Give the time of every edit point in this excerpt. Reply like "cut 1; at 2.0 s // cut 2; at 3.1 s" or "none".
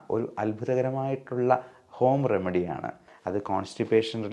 cut 1; at 3.1 s